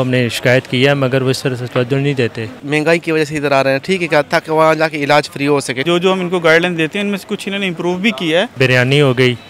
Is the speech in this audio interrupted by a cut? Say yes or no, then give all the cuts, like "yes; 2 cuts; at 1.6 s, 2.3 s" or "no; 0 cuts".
yes; 3 cuts; at 2.6 s, 5.8 s, 8.5 s